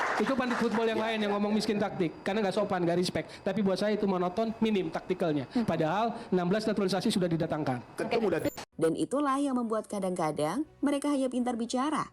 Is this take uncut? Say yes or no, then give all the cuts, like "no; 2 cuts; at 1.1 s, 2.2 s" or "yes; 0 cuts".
no; 1 cut; at 8.6 s